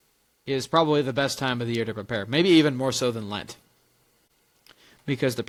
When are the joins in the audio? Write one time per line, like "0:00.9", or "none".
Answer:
none